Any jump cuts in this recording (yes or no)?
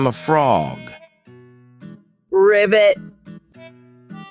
yes